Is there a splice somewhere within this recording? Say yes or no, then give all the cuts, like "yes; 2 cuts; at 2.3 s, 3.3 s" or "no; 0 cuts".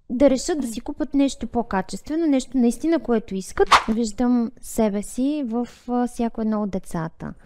yes; 1 cut; at 3.8 s